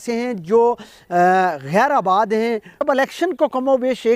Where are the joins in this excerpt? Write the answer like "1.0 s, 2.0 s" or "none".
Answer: 2.8 s